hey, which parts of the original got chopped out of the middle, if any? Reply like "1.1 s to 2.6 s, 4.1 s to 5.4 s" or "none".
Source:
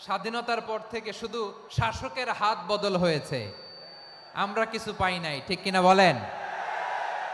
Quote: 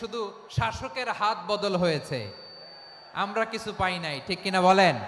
none